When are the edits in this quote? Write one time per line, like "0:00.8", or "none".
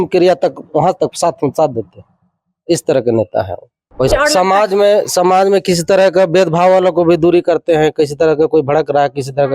0:04.1